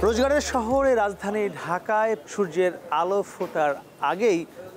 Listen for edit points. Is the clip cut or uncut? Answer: cut